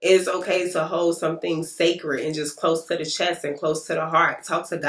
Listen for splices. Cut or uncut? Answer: uncut